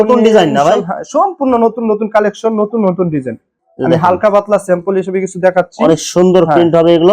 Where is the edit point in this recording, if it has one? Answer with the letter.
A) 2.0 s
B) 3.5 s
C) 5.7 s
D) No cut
B